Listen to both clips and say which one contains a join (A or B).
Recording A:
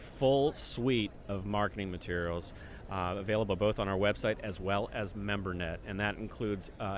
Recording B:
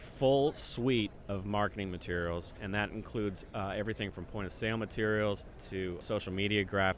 B